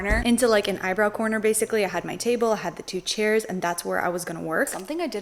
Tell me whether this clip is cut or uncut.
uncut